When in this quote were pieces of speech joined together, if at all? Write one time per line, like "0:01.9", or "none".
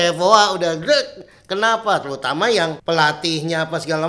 0:02.8